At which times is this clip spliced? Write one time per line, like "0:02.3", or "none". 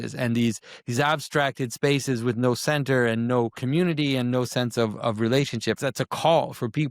0:03.6
0:05.8

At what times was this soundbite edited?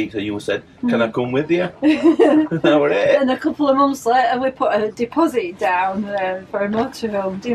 none

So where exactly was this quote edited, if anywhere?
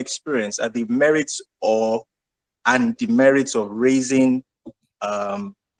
none

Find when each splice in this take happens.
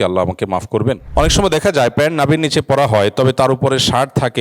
0:01.0

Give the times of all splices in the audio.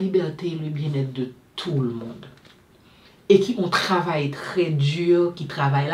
none

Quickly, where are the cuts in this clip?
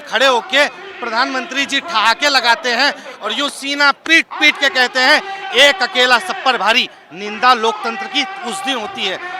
none

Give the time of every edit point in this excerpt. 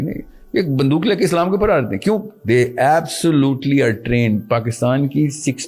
none

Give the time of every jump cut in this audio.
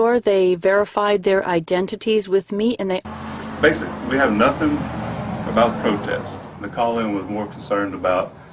none

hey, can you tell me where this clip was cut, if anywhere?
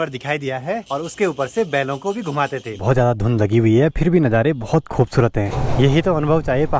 0:00.8
0:02.8
0:05.6

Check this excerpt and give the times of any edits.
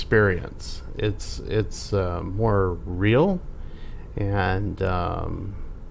none

